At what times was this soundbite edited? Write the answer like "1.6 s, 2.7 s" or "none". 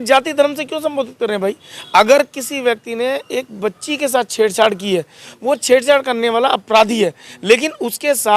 none

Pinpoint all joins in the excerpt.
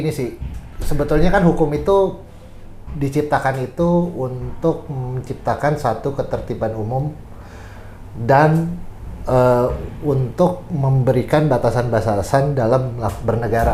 none

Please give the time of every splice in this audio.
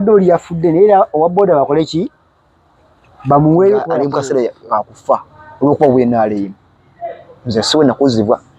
4.0 s

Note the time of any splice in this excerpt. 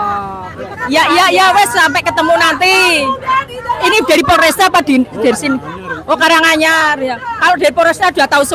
none

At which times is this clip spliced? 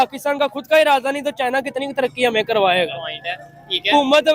none

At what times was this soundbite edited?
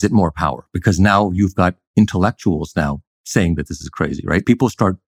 3.1 s

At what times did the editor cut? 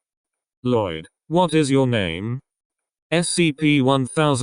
none

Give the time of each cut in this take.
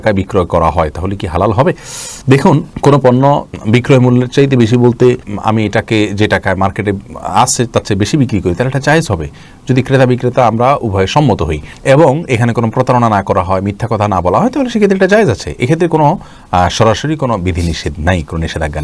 none

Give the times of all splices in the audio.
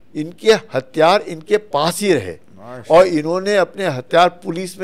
none

